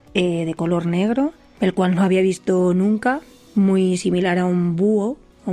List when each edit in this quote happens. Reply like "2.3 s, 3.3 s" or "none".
1.4 s